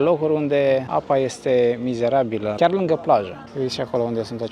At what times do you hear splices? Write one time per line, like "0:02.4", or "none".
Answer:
0:00.9
0:02.5
0:03.4